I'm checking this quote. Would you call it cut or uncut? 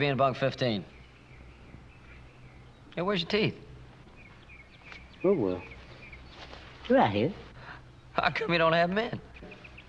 uncut